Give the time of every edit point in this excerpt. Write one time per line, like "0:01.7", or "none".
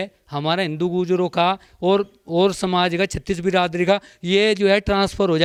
none